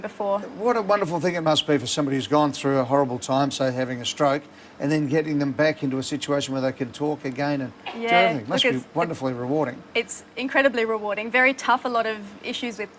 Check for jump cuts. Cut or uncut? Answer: uncut